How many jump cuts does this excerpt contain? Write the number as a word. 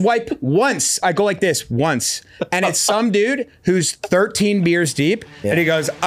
one